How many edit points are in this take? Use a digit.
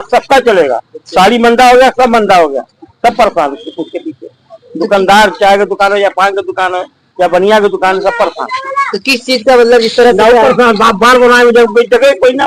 0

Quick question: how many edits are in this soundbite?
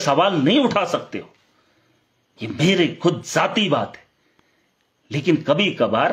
0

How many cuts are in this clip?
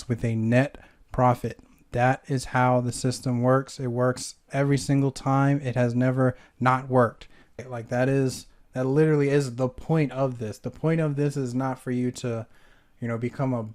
1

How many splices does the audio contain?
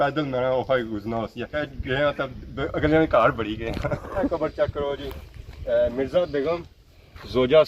2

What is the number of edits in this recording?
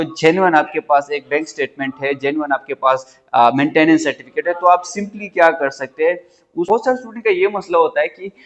1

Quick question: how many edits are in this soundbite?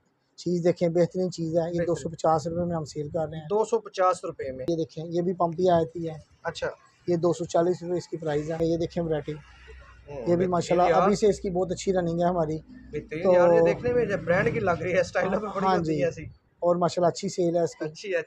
2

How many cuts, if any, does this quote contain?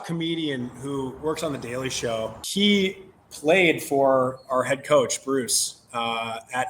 1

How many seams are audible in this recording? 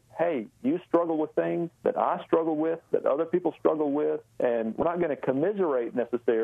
2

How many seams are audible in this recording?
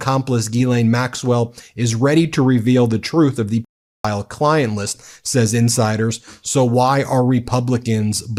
0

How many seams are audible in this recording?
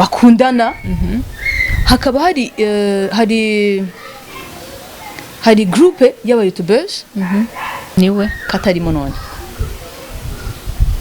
1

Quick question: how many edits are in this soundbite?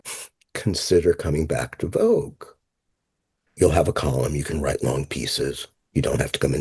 1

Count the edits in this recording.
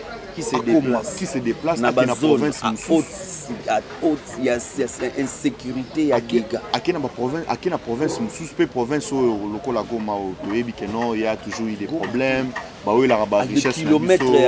0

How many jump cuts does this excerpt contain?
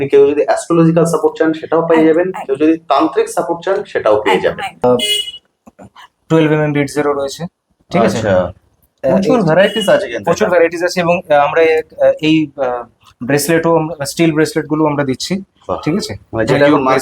1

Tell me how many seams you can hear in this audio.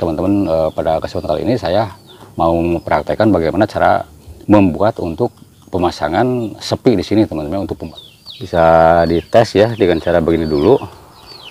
1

